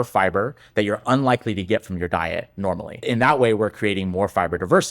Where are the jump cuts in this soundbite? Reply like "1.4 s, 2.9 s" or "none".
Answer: 2.9 s